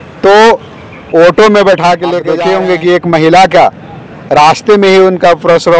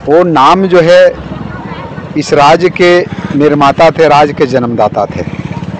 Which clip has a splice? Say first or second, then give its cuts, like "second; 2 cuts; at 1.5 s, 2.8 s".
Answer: first; 1 cut; at 2.3 s